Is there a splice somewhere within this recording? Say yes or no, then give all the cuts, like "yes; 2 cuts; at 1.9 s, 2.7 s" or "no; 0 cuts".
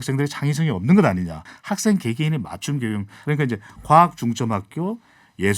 yes; 2 cuts; at 1.5 s, 3.2 s